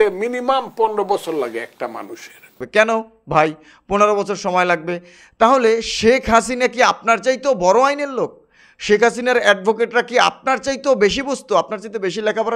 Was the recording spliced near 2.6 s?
yes; 1 cut; at 2.6 s

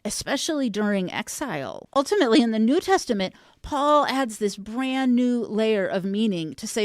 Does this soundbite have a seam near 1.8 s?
yes; 1 cut; at 1.8 s

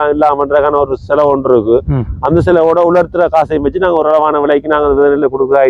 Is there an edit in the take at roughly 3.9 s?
yes; 1 cut; at 3.9 s

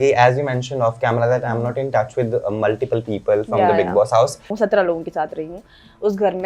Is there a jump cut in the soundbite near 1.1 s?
no; 1 cut; at 4.4 s

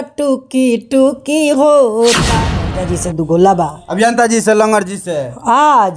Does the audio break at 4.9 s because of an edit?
no; 1 cut; at 2.3 s

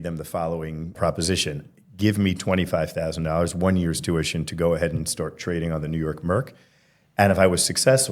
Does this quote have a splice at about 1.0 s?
yes; 1 cut; at 1.0 s

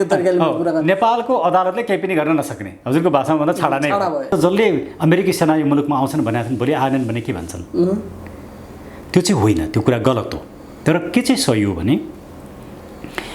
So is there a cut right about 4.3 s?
yes; 1 cut; at 4.3 s

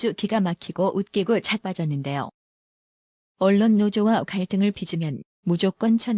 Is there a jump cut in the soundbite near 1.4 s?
no; 0 cuts

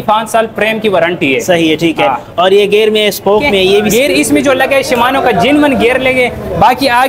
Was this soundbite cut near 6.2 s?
no; 1 cut; at 3.9 s

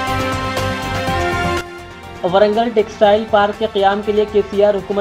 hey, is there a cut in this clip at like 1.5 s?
yes; 1 cut; at 1.5 s

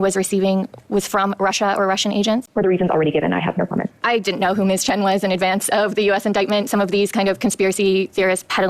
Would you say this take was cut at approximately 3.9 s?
yes; 2 cuts; at 2.5 s, 3.9 s

